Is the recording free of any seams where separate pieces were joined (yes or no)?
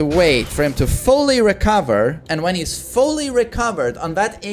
yes